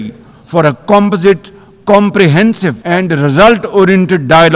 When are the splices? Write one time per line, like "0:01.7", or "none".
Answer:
0:02.8